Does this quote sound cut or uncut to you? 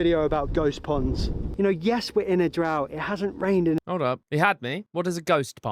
uncut